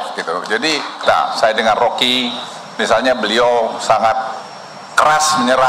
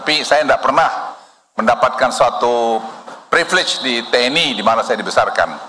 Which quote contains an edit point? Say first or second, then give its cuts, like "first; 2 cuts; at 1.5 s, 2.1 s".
first; 1 cut; at 1.0 s